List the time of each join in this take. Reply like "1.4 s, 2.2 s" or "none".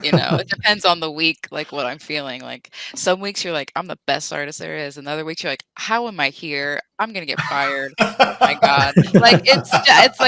none